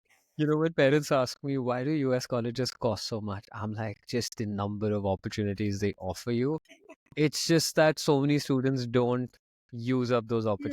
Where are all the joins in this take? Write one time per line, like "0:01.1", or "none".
none